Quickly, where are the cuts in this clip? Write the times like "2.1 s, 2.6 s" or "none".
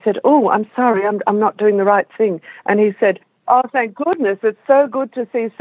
none